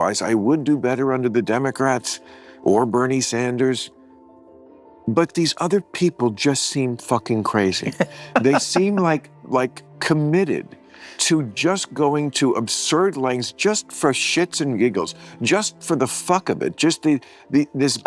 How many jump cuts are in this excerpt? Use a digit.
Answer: 0